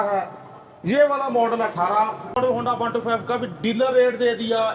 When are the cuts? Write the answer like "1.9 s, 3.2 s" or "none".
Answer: 2.4 s